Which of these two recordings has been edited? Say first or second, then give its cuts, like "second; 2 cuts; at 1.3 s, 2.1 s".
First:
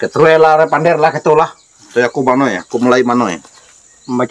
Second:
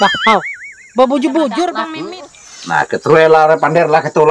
second; 1 cut; at 1.9 s